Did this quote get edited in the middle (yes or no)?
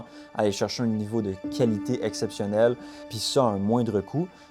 yes